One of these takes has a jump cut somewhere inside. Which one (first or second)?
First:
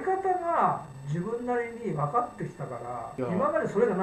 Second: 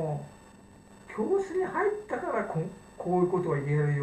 first